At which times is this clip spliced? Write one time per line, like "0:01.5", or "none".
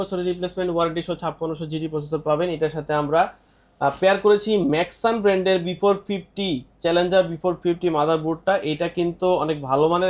none